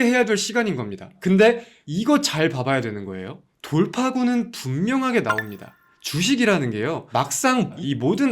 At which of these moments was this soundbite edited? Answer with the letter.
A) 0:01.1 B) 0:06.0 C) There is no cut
A